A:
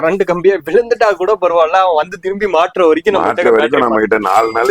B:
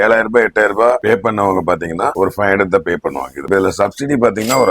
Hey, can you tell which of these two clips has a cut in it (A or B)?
B